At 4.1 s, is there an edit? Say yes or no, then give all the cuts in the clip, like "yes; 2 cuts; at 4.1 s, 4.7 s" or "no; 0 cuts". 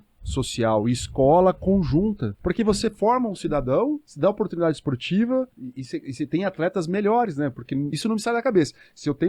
yes; 4 cuts; at 2.3 s, 4.1 s, 5.6 s, 7.9 s